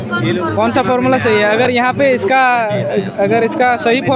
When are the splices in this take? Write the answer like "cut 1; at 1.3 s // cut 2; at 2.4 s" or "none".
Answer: cut 1; at 1.6 s